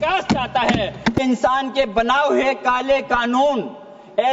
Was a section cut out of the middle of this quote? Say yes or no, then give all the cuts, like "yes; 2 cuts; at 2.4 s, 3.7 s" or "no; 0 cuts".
yes; 1 cut; at 1.2 s